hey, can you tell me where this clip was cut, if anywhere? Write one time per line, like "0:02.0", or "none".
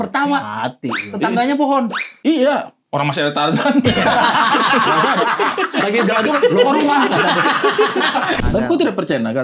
0:08.4